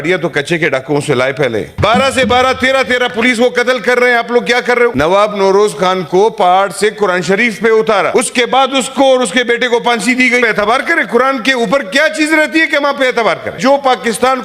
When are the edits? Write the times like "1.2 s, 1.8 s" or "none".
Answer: 1.7 s, 4.9 s, 8.1 s, 10.4 s, 13.6 s